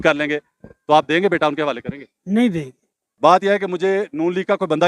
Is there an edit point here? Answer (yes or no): yes